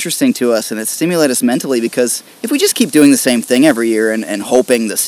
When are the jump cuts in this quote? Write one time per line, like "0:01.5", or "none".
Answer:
0:02.3